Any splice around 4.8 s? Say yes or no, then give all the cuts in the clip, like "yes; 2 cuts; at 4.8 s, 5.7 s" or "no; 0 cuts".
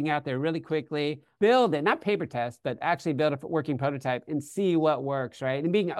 no; 1 cut; at 1.3 s